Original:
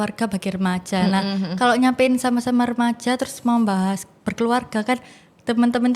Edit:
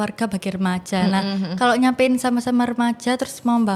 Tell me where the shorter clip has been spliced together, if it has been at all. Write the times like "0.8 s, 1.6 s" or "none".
none